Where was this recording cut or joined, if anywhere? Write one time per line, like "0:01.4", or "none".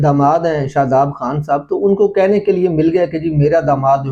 none

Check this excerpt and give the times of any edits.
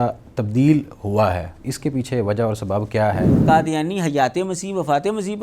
0:03.4

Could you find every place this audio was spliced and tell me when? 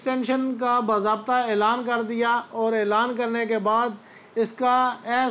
none

